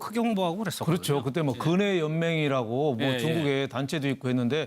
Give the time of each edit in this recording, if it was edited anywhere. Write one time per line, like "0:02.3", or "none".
0:03.1